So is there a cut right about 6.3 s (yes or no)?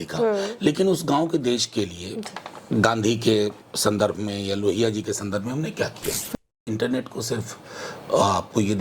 yes